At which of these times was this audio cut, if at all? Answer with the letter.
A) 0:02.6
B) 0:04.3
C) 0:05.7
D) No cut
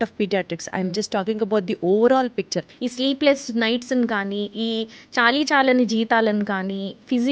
A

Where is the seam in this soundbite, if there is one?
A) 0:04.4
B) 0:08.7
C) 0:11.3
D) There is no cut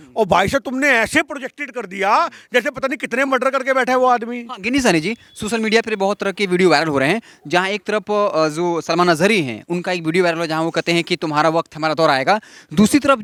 D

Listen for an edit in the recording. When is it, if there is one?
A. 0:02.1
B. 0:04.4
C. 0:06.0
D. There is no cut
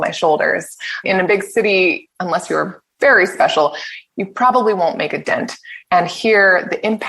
A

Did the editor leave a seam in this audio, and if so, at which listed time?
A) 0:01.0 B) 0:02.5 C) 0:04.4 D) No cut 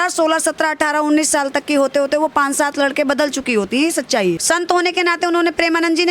C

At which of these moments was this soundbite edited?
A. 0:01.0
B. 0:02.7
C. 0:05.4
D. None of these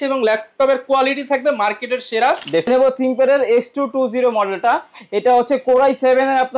B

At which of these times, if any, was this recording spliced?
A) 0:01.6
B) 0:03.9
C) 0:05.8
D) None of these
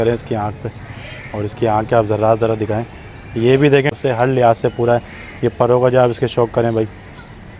B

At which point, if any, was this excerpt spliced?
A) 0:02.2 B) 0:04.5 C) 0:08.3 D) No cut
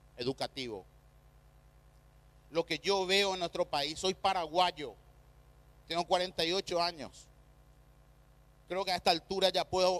B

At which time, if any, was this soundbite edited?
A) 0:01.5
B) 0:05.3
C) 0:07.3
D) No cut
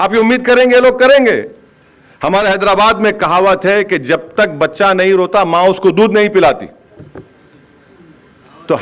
D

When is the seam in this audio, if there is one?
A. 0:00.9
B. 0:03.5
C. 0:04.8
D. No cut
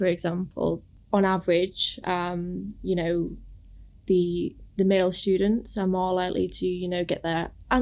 A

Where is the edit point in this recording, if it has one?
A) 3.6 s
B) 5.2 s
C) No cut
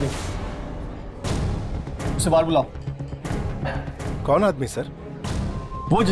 C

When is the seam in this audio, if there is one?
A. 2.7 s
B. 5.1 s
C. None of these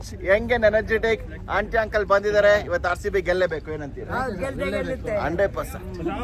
C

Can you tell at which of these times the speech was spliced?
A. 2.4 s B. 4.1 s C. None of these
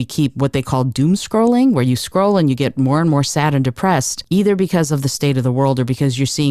B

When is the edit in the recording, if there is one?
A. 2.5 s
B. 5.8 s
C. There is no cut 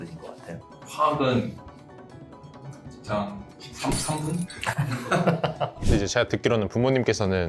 B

